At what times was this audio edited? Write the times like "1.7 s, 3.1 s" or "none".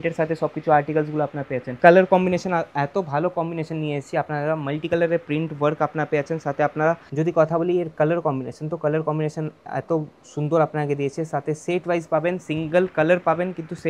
1.7 s, 7.1 s